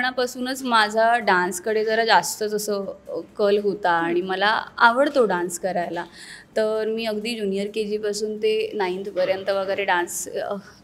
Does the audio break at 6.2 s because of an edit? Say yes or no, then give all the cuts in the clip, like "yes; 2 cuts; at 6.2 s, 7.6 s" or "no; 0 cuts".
no; 0 cuts